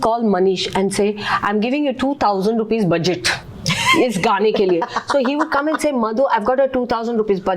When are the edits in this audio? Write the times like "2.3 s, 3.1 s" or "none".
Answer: none